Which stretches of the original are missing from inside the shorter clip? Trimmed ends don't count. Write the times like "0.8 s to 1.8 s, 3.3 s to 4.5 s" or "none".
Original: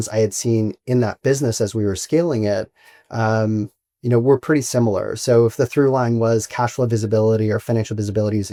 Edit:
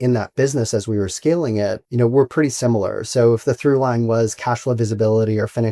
2.7 s to 4.0 s